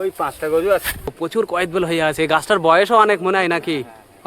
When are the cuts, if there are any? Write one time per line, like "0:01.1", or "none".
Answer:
0:01.1